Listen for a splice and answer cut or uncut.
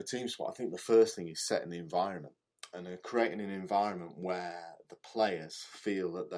uncut